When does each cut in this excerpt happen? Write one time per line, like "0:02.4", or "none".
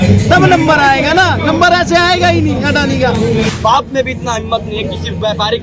0:03.5

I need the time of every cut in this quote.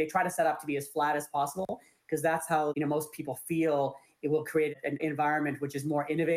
0:02.7
0:05.0

